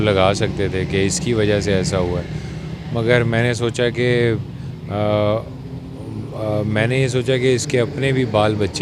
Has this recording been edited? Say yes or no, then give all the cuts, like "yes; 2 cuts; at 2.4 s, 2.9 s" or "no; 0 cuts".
no; 0 cuts